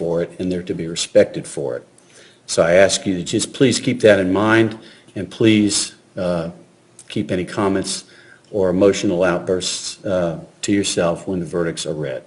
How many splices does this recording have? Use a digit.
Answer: 0